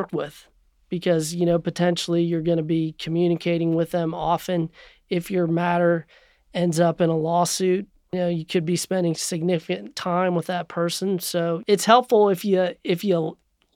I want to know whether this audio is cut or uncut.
cut